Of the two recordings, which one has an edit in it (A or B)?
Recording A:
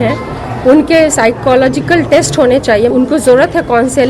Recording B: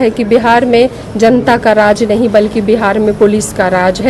A